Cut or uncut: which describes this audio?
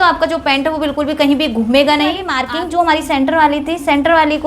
cut